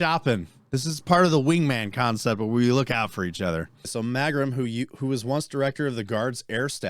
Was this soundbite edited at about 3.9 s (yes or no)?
yes